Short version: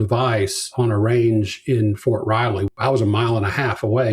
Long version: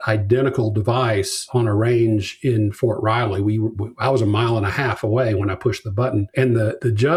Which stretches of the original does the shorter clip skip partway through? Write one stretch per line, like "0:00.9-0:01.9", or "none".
0:03.4-0:03.9